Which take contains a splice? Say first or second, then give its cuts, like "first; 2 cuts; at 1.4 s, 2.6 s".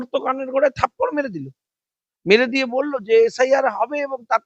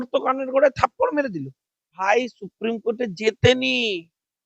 second; 1 cut; at 2.0 s